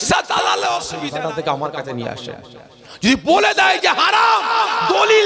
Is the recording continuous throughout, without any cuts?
no; 1 cut; at 1.0 s

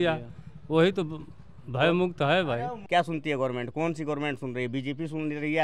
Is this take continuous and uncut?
no; 1 cut; at 2.8 s

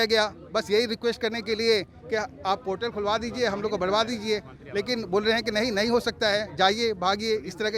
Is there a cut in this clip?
no; 0 cuts

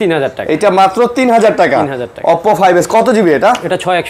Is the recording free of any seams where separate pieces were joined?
yes; 0 cuts

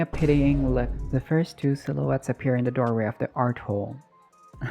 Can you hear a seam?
yes; 1 cut; at 1.0 s

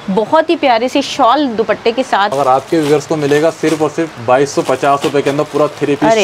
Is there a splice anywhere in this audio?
yes; 1 cut; at 2.3 s

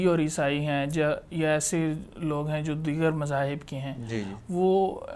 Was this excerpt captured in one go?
yes; 0 cuts

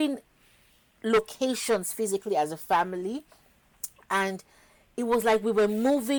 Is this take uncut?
yes; 0 cuts

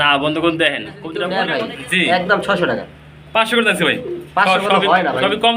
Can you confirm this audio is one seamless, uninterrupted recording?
no; 1 cut; at 1.2 s

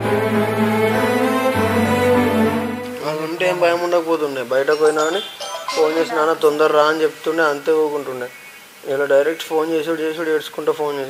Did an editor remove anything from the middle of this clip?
yes; 1 cut; at 2.8 s

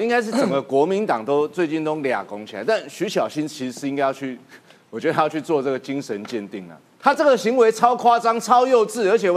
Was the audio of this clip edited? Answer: no; 0 cuts

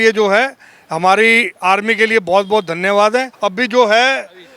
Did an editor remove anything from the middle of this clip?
yes; 1 cut; at 3.3 s

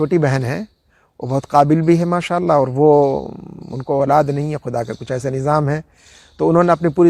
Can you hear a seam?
no; 0 cuts

